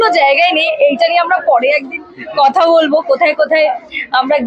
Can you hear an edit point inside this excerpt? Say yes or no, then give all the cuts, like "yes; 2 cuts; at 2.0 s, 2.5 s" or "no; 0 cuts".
no; 0 cuts